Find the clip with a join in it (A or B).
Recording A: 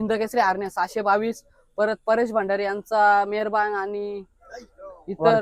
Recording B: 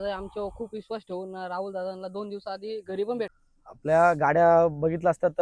B